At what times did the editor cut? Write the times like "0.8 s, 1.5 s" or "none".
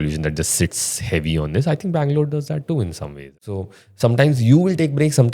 3.6 s